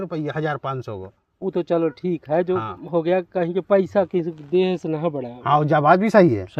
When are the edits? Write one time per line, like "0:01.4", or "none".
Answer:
none